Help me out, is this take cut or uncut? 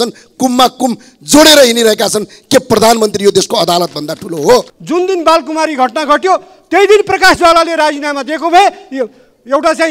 cut